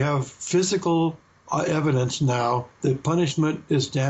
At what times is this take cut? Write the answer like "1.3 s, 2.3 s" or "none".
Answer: none